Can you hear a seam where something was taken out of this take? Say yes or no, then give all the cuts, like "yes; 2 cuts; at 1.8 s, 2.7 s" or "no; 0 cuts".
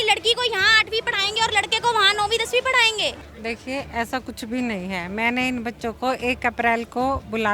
yes; 1 cut; at 3.3 s